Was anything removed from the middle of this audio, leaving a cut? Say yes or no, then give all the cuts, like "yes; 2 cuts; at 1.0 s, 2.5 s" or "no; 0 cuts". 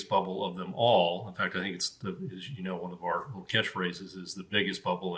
no; 0 cuts